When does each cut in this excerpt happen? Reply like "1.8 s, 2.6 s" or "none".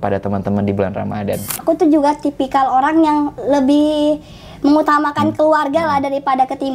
1.5 s